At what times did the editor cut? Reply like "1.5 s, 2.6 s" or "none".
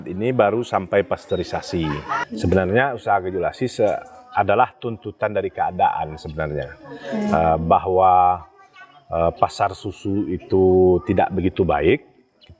2.1 s